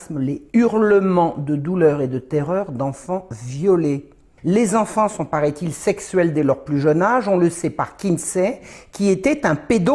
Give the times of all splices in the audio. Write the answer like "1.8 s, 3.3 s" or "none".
4.3 s